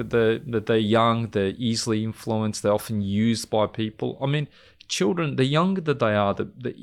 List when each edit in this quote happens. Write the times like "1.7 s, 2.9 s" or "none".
none